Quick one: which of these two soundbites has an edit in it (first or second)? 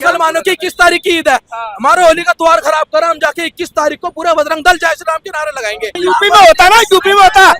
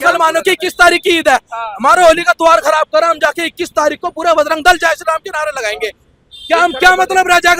first